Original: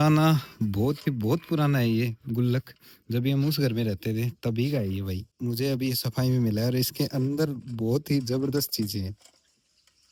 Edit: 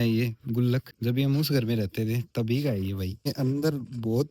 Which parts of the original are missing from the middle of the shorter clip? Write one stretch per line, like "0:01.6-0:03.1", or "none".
0:02.7-0:03.0
0:05.3-0:07.0